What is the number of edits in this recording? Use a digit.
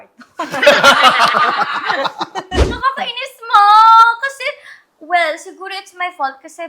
1